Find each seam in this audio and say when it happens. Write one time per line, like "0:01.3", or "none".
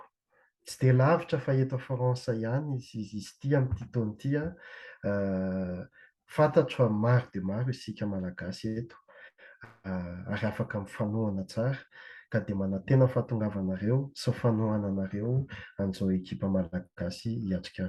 none